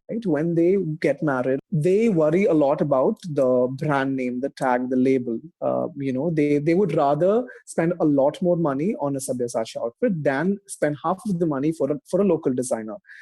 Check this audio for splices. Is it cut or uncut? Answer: cut